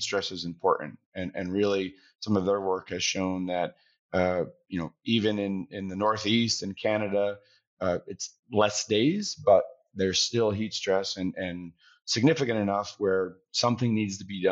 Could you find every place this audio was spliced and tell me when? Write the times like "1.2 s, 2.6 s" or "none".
none